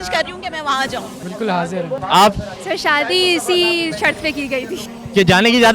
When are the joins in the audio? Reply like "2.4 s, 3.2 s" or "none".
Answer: 1.4 s